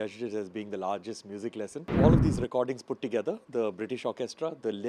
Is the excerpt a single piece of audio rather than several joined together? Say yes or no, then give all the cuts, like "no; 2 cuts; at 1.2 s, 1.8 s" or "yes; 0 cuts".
no; 1 cut; at 1.9 s